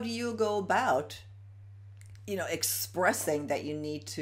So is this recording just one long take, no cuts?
yes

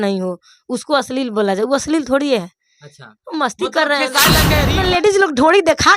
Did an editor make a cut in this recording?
yes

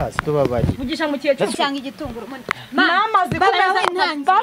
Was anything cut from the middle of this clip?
yes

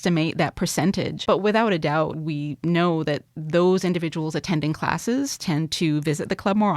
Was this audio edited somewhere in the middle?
yes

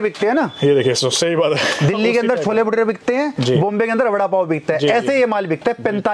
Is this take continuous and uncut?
yes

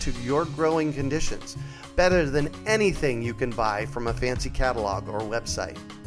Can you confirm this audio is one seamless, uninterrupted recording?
yes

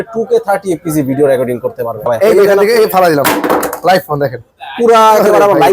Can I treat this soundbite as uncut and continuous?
no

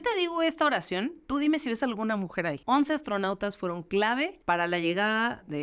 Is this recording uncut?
yes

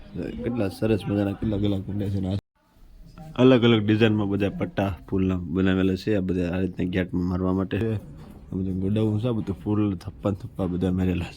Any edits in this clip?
yes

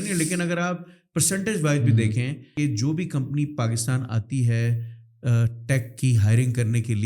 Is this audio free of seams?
no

